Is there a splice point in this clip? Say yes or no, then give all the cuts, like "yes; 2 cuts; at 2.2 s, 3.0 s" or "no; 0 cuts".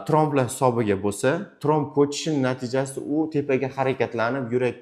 no; 0 cuts